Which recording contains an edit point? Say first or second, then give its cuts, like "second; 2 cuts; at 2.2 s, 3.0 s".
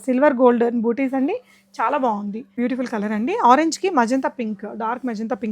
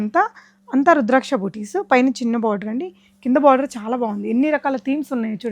first; 1 cut; at 2.6 s